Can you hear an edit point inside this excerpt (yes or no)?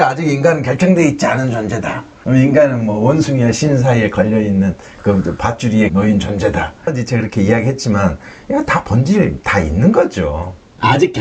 no